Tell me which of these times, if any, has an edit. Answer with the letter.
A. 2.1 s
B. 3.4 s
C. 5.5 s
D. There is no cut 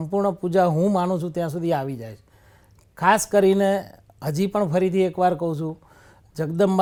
D